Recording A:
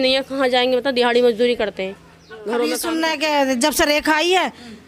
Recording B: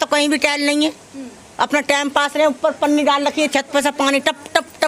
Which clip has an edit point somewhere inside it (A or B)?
A